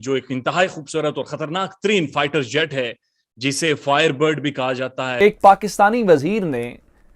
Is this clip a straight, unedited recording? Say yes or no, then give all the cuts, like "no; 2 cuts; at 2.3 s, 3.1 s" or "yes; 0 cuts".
no; 1 cut; at 5.1 s